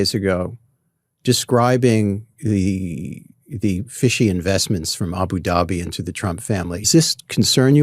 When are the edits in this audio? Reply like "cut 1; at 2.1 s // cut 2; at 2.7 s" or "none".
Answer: cut 1; at 6.9 s